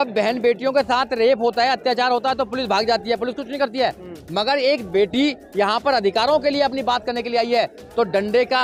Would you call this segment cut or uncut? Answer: uncut